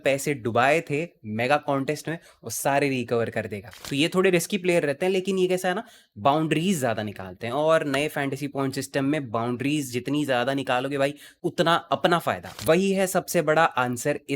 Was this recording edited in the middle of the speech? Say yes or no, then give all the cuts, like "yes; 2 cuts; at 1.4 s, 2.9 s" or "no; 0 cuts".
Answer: yes; 2 cuts; at 3.7 s, 12.6 s